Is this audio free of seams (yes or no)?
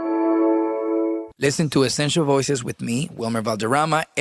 no